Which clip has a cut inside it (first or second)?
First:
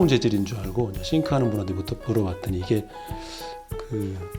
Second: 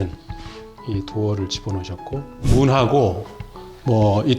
second